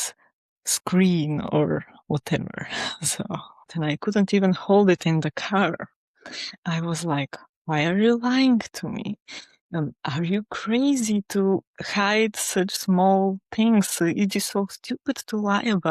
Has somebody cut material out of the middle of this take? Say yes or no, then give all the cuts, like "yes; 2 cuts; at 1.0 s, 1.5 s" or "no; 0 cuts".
yes; 1 cut; at 3.7 s